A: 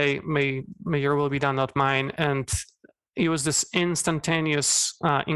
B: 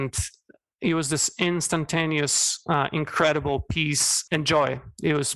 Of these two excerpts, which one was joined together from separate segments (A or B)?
B